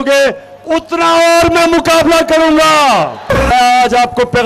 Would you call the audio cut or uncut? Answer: cut